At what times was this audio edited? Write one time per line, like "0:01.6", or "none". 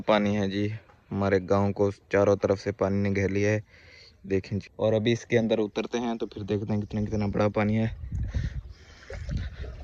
0:06.3